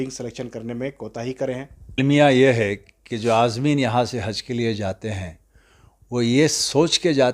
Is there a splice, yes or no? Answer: yes